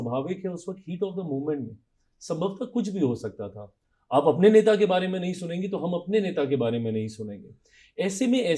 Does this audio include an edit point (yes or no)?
no